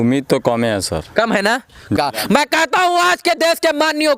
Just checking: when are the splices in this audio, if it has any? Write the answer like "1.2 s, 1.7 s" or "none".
2.0 s